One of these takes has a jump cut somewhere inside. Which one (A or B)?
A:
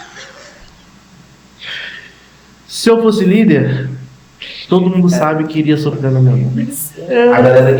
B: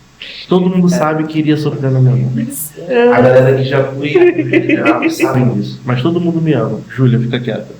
B